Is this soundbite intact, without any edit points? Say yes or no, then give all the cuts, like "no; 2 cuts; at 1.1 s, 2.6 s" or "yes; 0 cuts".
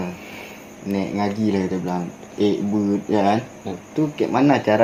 yes; 0 cuts